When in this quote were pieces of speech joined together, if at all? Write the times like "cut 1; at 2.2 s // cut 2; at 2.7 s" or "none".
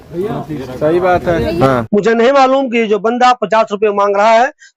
cut 1; at 1.8 s